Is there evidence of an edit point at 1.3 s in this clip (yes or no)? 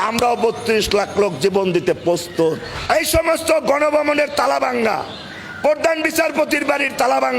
no